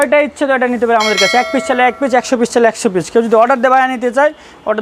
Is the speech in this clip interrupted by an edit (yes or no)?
no